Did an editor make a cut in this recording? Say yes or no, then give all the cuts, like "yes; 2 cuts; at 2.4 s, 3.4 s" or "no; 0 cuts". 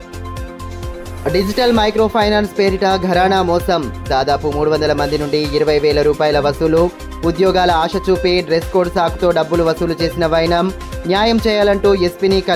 no; 0 cuts